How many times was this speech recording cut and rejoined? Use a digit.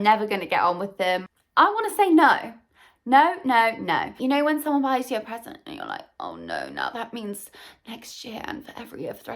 2